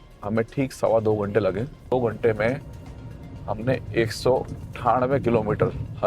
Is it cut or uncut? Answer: cut